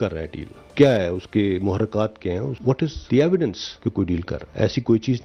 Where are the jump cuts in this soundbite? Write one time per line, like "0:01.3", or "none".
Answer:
none

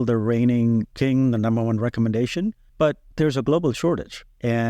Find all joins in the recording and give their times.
0:00.9
0:02.9

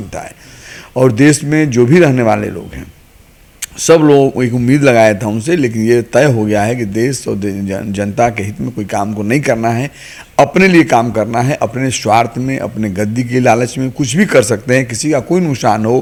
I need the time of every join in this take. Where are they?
none

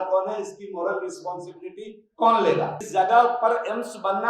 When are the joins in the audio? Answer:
0:02.8

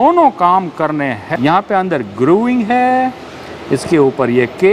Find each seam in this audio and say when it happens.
0:01.4

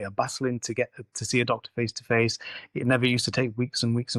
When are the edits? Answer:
none

